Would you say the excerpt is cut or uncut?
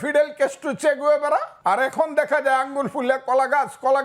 cut